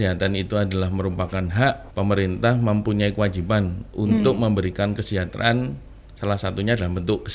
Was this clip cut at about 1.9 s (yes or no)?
yes